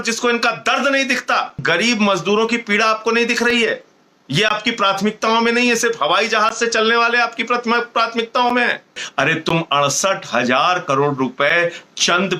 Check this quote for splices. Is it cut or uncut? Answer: cut